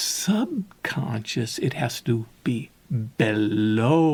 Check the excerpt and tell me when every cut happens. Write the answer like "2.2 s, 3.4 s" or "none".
none